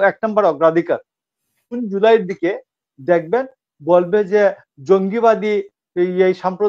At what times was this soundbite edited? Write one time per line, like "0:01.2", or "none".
0:01.7